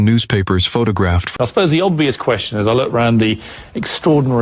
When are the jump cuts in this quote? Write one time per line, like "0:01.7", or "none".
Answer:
0:01.3